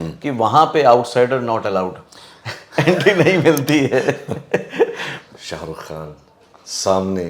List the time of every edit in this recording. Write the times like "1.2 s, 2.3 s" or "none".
5.1 s